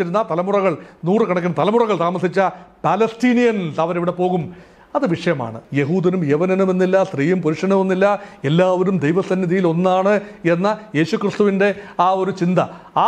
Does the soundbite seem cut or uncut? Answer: cut